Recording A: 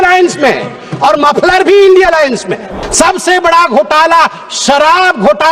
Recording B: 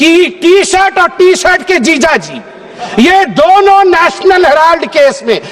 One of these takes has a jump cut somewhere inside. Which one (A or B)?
A